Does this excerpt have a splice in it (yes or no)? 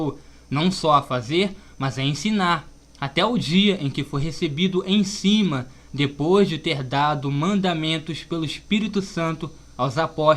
no